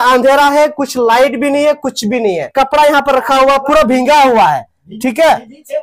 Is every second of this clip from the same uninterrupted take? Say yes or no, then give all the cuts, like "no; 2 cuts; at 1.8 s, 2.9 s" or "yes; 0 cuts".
no; 1 cut; at 2.5 s